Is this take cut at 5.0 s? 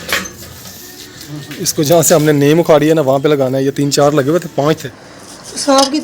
yes; 1 cut; at 5.0 s

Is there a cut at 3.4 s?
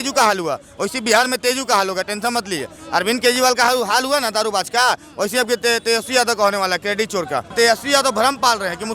no; 1 cut; at 7.5 s

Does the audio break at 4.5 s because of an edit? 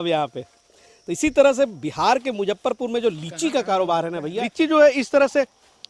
yes; 1 cut; at 4.5 s

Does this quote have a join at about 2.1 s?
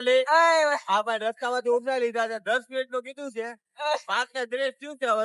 no; 0 cuts

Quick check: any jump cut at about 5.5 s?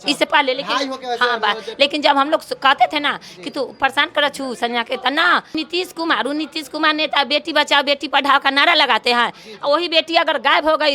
yes; 1 cut; at 5.5 s

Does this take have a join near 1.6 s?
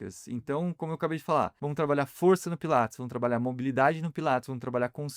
yes; 1 cut; at 1.6 s

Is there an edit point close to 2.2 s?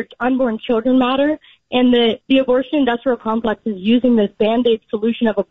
yes; 1 cut; at 2.2 s

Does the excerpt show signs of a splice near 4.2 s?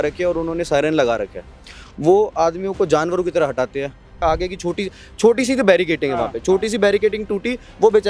yes; 1 cut; at 4.2 s

